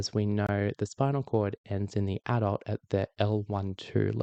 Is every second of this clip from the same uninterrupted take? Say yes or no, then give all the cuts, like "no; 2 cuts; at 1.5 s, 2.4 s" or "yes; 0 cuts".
yes; 0 cuts